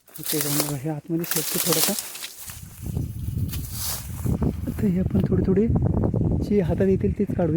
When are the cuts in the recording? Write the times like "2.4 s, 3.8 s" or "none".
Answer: none

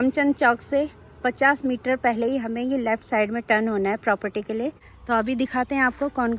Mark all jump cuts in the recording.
4.9 s

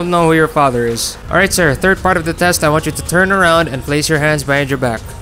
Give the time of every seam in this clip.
1.1 s

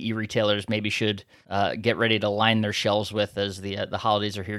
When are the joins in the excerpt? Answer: 1.3 s

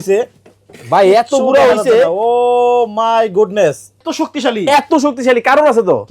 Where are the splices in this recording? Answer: 4.1 s

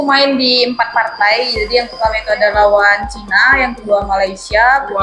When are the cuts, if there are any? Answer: none

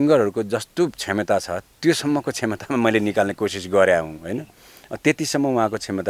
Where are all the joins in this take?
none

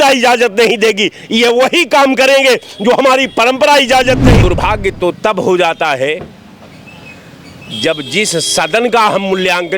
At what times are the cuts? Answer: 4.4 s

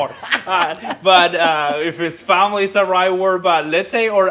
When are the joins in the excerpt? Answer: none

